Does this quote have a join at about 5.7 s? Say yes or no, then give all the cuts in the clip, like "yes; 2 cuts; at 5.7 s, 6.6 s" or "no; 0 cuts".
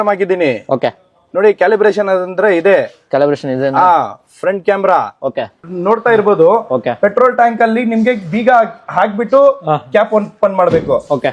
yes; 1 cut; at 5.7 s